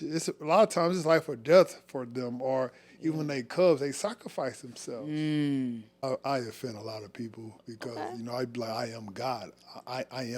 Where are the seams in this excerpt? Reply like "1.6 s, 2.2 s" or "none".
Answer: 6.0 s